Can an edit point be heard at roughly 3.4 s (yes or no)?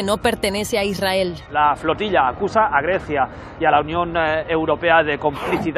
no